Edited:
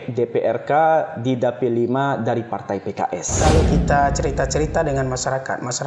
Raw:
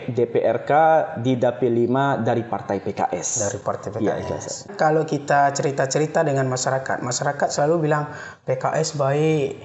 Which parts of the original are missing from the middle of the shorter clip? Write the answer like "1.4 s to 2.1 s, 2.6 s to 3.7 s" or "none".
3.3 s to 4.7 s